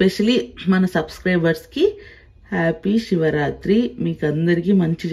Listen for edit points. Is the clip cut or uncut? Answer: uncut